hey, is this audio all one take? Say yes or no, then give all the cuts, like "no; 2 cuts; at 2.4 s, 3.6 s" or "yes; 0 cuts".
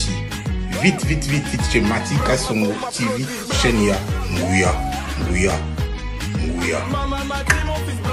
yes; 0 cuts